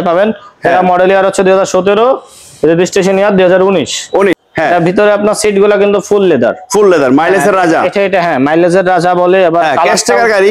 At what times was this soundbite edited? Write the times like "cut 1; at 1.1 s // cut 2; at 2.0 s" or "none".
cut 1; at 4.4 s